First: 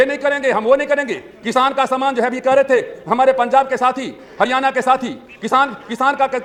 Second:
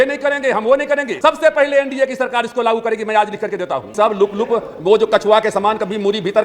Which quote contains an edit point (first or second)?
second